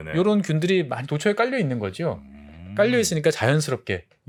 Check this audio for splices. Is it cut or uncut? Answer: uncut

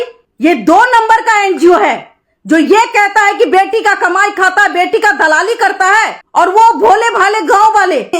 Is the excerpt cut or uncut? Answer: uncut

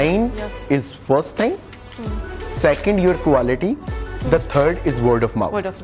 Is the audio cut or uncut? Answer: uncut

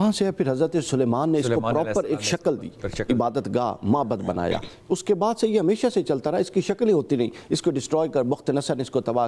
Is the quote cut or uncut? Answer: uncut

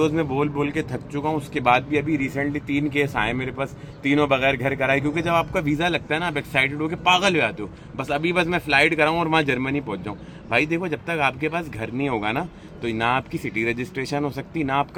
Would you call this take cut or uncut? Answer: uncut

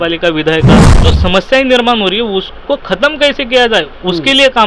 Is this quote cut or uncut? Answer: cut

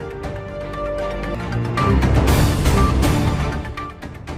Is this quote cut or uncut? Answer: uncut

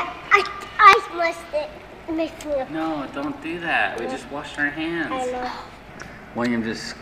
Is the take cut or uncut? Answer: cut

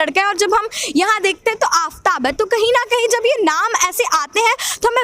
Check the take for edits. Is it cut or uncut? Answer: uncut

